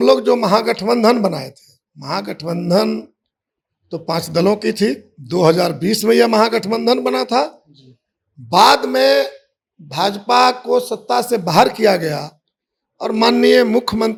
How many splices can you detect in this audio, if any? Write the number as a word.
zero